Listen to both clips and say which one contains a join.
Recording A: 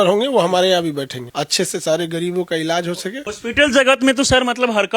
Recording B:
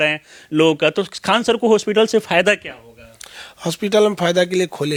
A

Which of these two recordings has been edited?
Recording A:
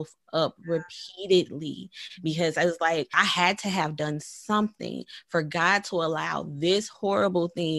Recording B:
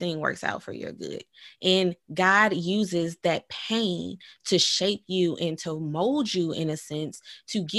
A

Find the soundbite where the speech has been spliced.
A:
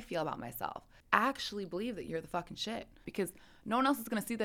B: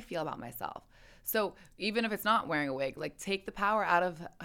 A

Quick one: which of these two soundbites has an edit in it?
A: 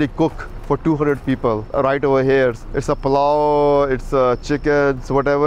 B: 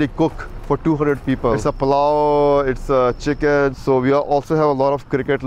B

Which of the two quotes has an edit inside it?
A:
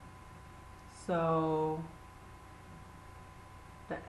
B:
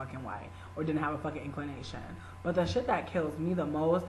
B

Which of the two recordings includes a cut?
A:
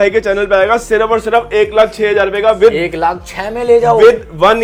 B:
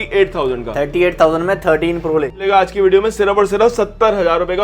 B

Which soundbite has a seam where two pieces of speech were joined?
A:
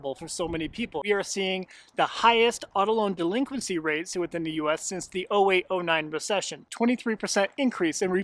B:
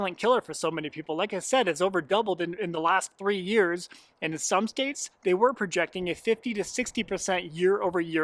A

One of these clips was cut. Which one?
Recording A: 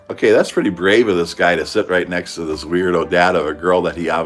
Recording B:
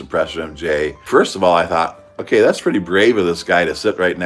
B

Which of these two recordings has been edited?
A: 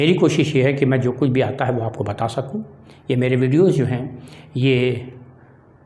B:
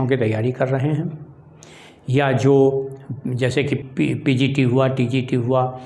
B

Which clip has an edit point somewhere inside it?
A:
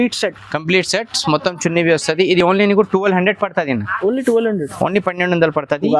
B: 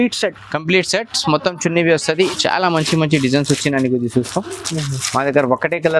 B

